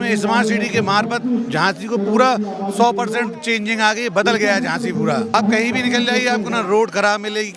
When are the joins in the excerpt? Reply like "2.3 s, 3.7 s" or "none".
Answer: none